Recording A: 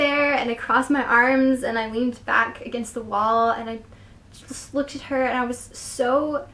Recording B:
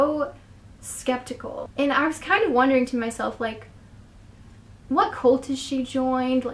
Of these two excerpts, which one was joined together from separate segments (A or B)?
B